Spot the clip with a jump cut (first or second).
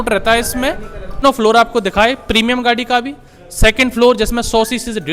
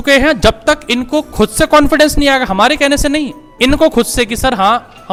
first